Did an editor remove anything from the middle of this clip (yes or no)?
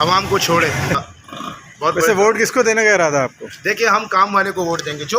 yes